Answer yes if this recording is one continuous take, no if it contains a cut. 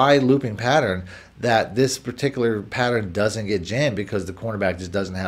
yes